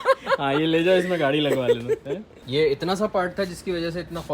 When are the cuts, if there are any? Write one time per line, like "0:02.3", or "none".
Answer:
0:02.3